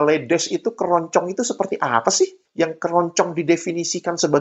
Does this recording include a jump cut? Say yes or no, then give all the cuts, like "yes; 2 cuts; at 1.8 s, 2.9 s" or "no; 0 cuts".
no; 0 cuts